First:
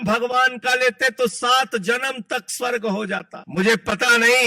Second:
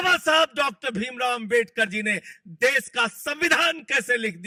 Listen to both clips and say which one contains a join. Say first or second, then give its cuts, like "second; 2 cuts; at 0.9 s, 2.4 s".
first; 1 cut; at 3.4 s